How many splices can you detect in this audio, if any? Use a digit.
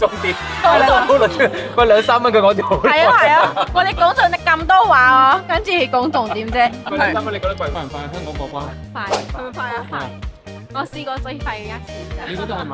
1